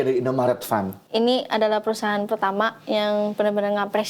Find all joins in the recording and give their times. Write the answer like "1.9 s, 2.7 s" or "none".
1.0 s